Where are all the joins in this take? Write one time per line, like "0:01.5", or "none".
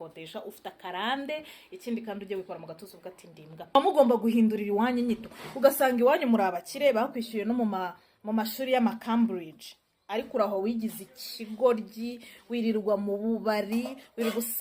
0:03.8